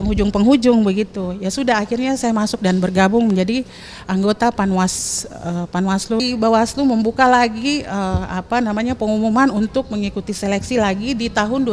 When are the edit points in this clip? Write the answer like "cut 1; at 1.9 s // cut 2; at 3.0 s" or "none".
cut 1; at 6.2 s